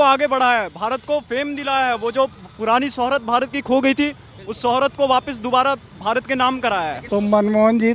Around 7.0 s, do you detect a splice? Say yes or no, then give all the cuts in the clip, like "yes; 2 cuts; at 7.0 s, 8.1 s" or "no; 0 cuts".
yes; 1 cut; at 7.0 s